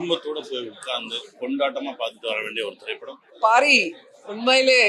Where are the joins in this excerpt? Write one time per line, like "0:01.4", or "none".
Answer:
0:03.2

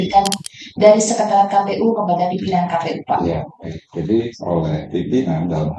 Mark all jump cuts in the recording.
0:04.4

